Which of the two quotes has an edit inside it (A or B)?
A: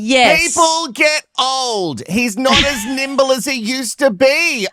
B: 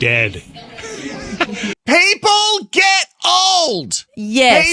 B